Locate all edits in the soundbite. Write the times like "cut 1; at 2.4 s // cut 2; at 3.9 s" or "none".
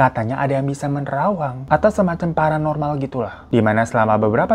cut 1; at 3.4 s